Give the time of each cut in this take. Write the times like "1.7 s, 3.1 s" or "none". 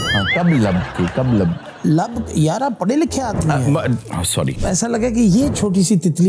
4.6 s